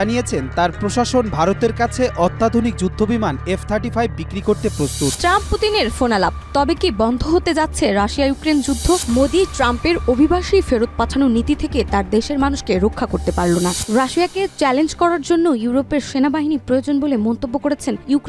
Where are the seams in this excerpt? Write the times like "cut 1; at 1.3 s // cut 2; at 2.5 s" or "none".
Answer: cut 1; at 5.2 s // cut 2; at 9.0 s // cut 3; at 13.8 s